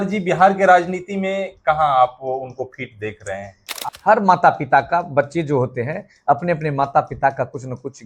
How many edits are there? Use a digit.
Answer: 1